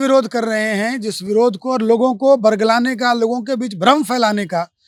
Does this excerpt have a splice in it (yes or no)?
no